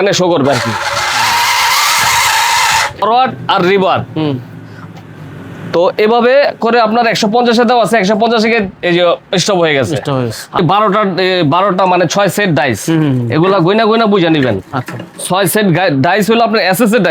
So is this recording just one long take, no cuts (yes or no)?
no